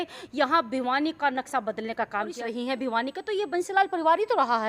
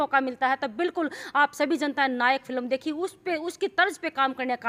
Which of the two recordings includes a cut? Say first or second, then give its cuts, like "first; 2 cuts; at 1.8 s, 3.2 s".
first; 1 cut; at 2.3 s